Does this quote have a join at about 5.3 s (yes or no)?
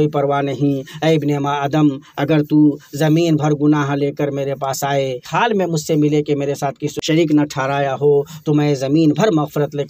yes